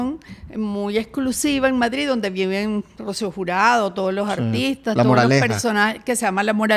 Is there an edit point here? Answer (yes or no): no